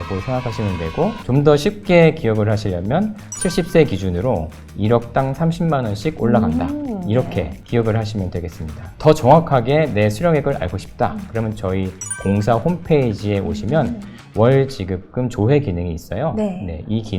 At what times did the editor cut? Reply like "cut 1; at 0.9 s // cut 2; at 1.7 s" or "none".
cut 1; at 8.9 s